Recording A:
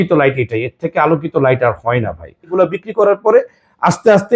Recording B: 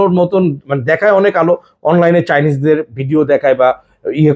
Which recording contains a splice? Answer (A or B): A